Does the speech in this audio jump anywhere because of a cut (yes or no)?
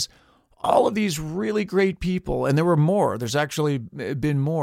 no